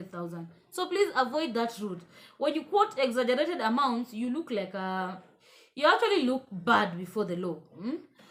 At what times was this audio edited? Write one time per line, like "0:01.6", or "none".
none